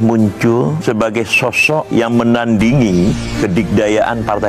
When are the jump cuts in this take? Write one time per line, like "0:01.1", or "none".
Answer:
none